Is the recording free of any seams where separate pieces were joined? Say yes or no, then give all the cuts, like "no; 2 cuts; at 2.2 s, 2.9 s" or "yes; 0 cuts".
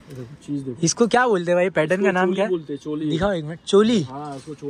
yes; 0 cuts